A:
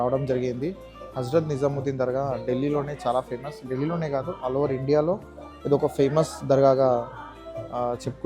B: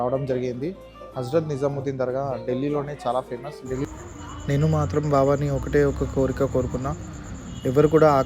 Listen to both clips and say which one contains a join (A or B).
B